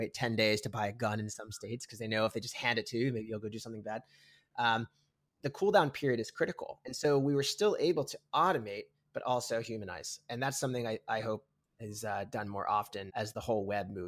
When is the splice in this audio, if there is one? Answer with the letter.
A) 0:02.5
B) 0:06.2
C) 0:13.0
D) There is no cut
C